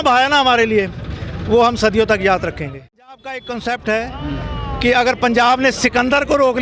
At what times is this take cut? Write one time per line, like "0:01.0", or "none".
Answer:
0:03.3